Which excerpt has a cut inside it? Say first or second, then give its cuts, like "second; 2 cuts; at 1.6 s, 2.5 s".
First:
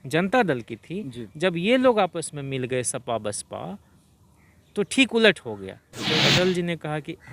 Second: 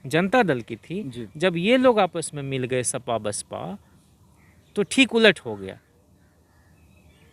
first; 1 cut; at 5.9 s